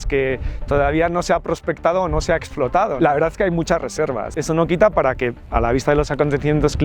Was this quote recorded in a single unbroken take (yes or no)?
no